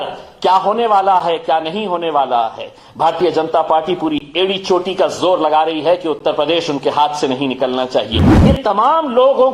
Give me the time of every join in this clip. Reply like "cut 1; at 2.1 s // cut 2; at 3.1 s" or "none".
cut 1; at 8.3 s